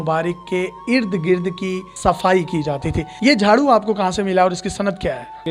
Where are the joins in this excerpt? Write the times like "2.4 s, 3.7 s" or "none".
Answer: none